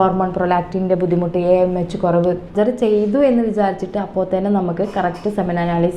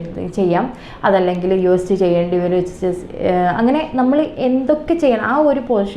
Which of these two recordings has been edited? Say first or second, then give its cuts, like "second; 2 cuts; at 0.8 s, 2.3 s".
first; 1 cut; at 2.5 s